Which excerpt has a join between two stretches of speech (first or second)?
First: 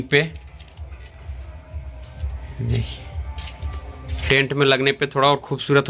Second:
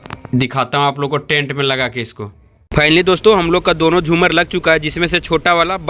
first